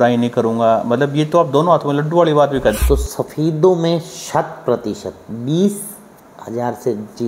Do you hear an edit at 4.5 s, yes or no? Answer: no